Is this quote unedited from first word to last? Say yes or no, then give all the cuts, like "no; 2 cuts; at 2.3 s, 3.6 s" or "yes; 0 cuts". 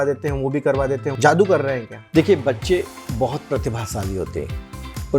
no; 2 cuts; at 1.1 s, 1.9 s